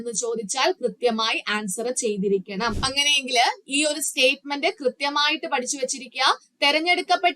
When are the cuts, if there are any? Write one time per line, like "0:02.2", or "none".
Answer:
0:02.8